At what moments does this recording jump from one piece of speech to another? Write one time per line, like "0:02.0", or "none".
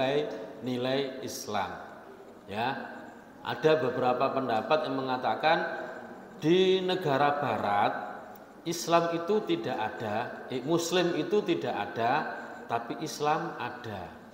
none